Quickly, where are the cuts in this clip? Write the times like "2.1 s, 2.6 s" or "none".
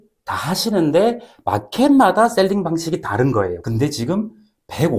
3.6 s